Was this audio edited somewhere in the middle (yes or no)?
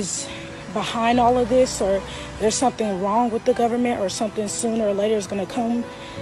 no